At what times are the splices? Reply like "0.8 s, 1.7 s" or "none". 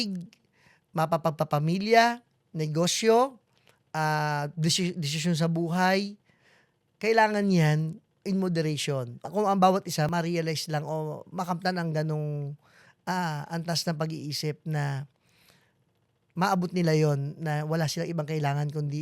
8.1 s, 9.2 s, 10.1 s